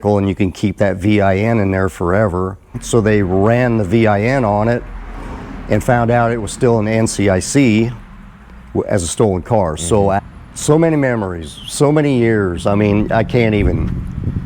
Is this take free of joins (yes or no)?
no